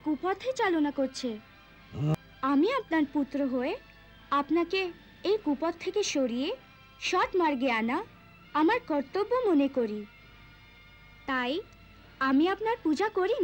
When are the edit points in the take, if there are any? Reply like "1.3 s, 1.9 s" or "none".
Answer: 2.3 s